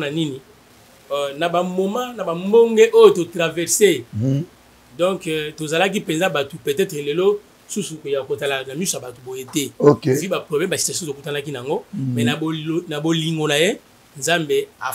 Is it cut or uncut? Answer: uncut